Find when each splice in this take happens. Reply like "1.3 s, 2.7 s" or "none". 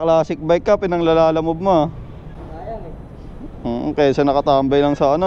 none